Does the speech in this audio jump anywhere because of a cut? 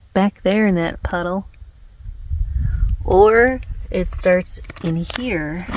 no; 0 cuts

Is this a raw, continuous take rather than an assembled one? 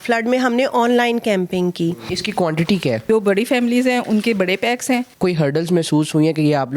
no; 3 cuts; at 2.1 s, 3.0 s, 5.1 s

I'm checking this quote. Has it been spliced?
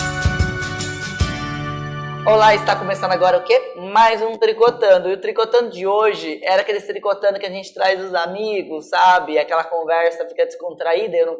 no; 0 cuts

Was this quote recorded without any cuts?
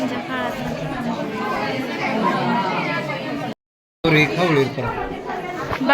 no; 1 cut; at 3.6 s

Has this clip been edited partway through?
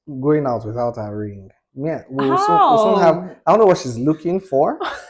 no; 0 cuts

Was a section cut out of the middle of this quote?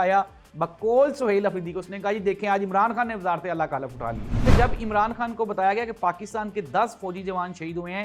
yes; 1 cut; at 4.5 s

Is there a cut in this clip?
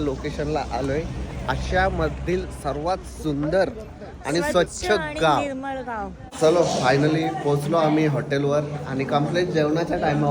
yes; 1 cut; at 6.2 s

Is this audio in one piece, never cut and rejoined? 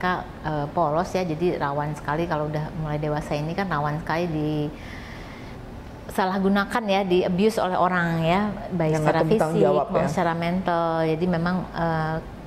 yes; 0 cuts

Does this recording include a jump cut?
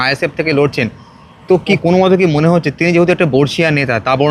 yes; 1 cut; at 1.8 s

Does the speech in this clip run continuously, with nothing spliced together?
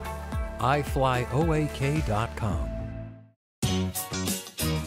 no; 1 cut; at 3.4 s

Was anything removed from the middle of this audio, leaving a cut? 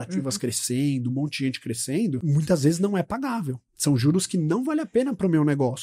yes; 1 cut; at 2.2 s

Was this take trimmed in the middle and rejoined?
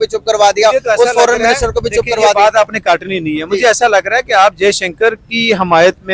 no; 0 cuts

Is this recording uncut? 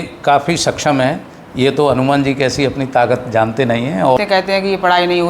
no; 1 cut; at 4.2 s

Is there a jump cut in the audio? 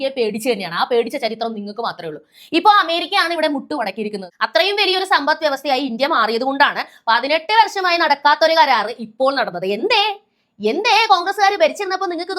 yes; 1 cut; at 4.2 s

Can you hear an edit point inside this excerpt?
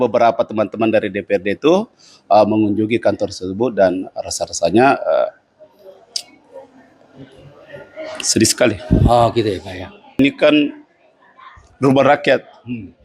yes; 1 cut; at 10.2 s

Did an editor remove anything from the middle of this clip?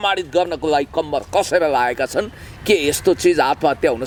no; 0 cuts

